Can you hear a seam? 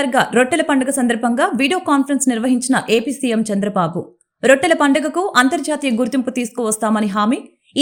no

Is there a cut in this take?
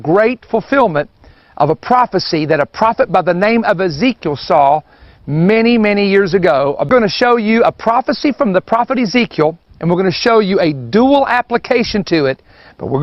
yes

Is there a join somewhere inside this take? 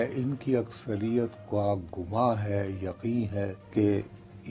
yes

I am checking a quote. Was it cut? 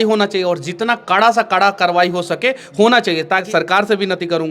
yes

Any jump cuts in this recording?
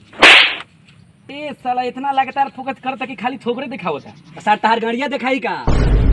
no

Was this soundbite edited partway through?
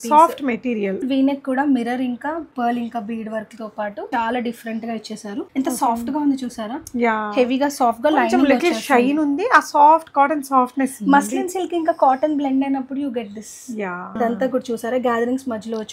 yes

